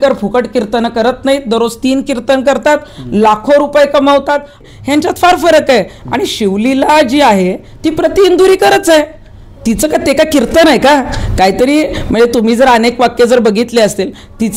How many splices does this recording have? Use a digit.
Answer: 1